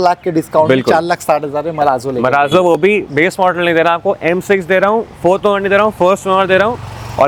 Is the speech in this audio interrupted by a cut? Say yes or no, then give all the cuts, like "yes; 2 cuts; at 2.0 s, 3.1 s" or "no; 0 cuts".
no; 0 cuts